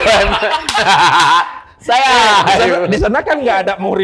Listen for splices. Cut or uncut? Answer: uncut